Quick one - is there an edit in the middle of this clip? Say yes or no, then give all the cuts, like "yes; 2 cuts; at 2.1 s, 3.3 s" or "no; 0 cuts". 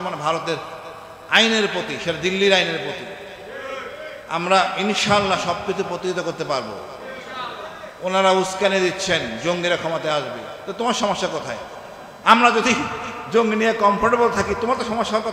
no; 0 cuts